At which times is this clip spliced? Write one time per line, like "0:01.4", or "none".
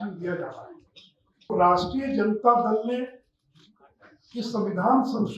0:01.5